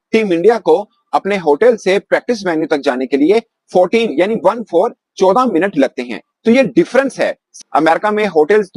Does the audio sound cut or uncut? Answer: uncut